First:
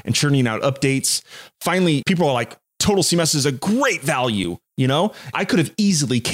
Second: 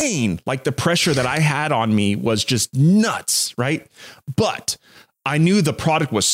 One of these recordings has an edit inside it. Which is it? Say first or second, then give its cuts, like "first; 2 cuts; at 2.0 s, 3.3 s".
first; 2 cuts; at 2.0 s, 5.3 s